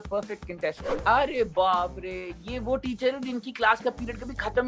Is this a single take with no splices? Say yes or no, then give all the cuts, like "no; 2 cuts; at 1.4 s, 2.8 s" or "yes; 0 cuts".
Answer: no; 1 cut; at 0.9 s